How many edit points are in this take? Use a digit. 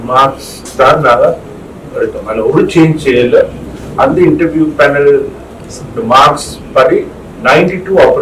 0